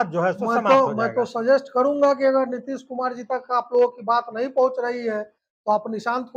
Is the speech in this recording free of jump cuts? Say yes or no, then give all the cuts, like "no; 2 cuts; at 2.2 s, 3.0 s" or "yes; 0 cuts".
yes; 0 cuts